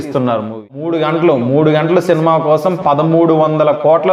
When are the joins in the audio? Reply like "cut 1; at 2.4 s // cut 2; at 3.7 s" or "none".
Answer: cut 1; at 0.9 s